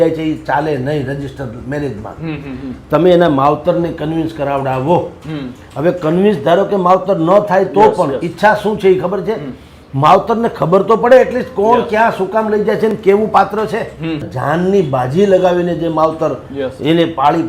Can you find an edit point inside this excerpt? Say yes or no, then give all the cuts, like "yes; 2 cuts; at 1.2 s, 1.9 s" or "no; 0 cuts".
yes; 1 cut; at 14.3 s